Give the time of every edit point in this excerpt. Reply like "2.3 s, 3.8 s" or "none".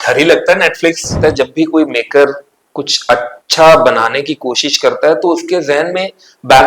1.1 s